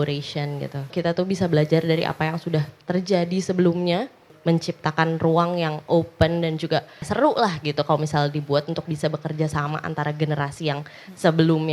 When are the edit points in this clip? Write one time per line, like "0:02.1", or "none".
0:00.9
0:04.3
0:07.1